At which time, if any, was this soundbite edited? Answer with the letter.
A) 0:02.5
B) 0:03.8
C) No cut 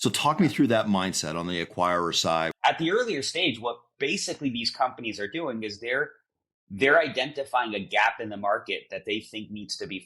A